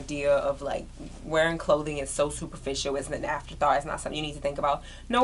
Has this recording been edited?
no; 0 cuts

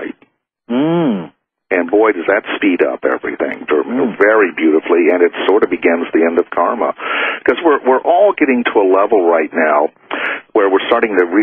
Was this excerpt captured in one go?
no; 1 cut; at 8.7 s

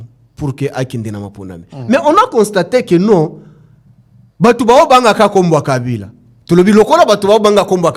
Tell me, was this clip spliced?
no; 0 cuts

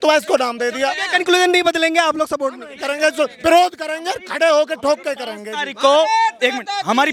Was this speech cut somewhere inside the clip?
no; 0 cuts

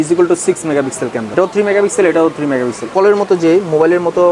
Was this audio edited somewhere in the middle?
yes; 2 cuts; at 1.3 s, 2.8 s

